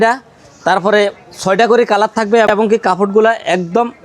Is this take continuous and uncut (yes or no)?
yes